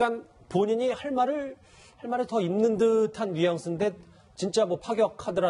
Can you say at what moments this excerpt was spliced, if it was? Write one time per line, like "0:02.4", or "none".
0:02.2